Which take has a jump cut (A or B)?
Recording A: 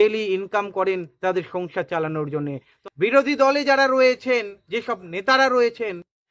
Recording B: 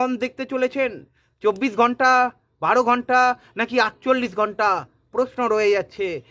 A